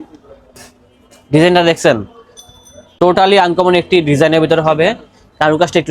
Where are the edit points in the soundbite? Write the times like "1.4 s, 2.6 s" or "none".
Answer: none